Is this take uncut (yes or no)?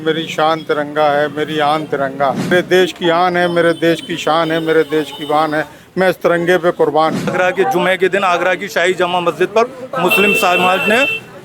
no